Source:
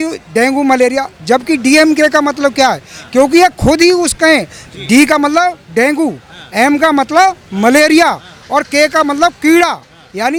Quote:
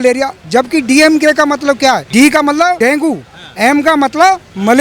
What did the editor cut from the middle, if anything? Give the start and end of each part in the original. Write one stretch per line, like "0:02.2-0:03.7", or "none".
0:02.8-0:04.8
0:05.5-0:05.7

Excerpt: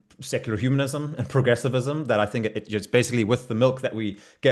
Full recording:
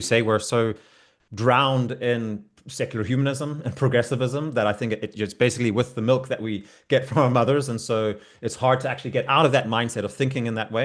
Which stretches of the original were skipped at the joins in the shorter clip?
none

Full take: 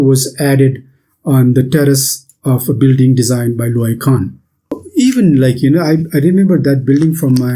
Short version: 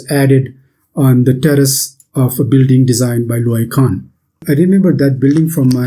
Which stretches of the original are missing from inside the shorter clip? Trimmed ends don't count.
0:04.7-0:06.1

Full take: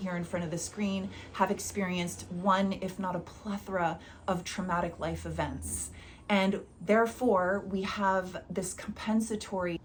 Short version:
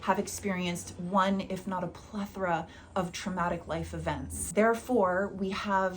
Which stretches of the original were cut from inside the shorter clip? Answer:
0:05.7-0:06.7

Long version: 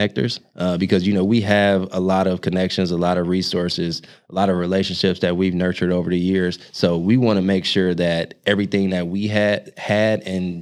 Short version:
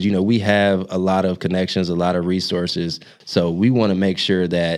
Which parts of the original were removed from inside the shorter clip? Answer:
0:04.2-0:06.6

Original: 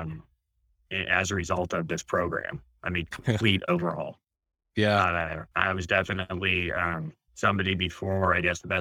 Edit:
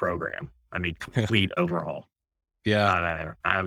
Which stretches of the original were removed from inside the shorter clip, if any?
none

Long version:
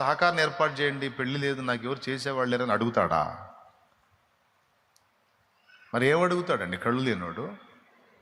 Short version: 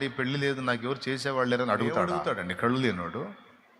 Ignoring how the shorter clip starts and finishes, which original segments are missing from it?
0:03.1-0:06.4

